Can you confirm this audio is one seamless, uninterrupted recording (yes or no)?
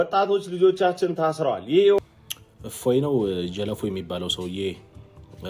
no